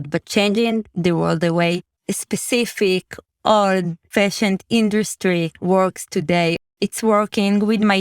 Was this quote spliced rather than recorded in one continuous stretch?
yes; 3 cuts; at 1.9 s, 4.0 s, 6.7 s

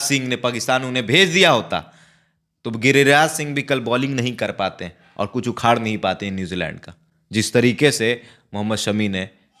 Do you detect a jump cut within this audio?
no; 0 cuts

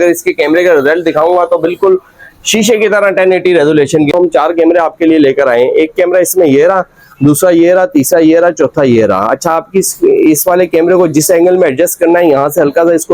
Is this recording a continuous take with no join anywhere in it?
no; 1 cut; at 4.1 s

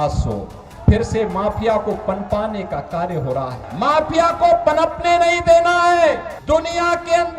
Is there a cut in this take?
yes; 2 cuts; at 3.6 s, 6.3 s

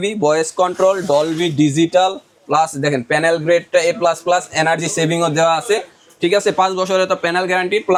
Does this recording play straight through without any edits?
yes; 0 cuts

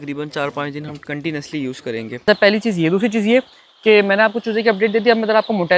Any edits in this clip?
yes; 1 cut; at 2.1 s

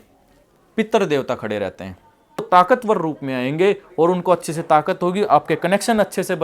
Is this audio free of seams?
no; 1 cut; at 2.4 s

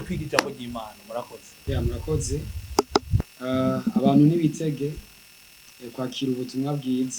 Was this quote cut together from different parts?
no; 0 cuts

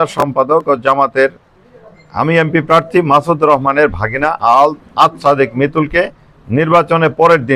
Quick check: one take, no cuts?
yes; 0 cuts

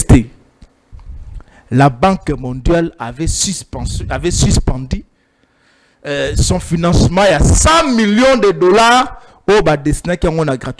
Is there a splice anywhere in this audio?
no; 0 cuts

